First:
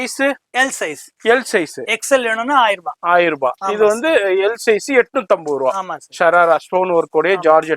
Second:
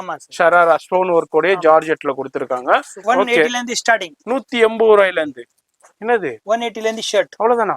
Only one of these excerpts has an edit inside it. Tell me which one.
second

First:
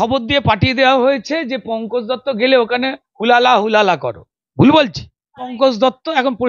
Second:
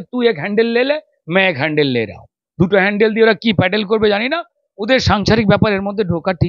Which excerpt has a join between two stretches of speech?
first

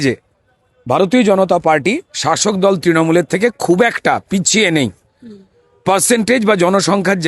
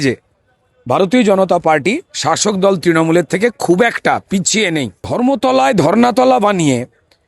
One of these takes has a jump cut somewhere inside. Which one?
second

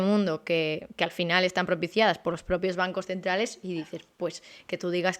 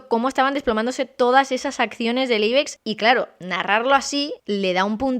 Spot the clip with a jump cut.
second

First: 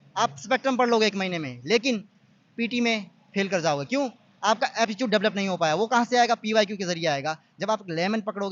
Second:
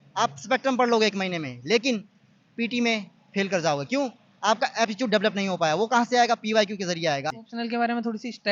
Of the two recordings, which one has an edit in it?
second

